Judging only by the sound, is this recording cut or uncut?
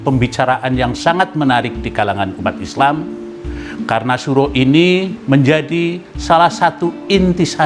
cut